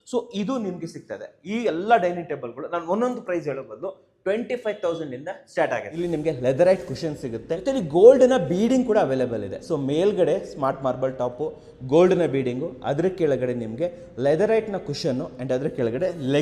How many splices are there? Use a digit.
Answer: 2